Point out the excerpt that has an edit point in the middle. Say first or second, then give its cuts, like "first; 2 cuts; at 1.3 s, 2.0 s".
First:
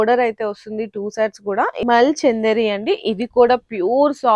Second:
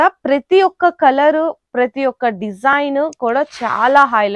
first; 1 cut; at 1.8 s